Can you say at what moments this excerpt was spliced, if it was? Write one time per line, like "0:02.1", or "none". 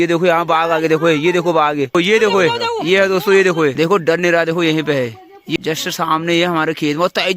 0:01.9
0:03.7
0:05.6